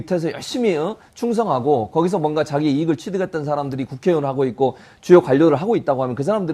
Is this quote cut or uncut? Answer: cut